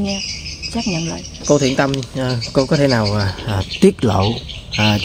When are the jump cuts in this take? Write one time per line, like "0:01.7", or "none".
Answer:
0:01.4